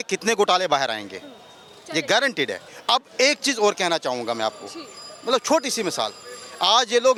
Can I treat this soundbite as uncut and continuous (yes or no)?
yes